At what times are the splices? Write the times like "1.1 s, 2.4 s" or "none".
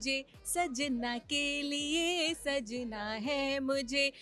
none